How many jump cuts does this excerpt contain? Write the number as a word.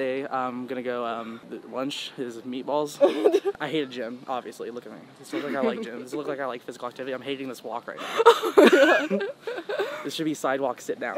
two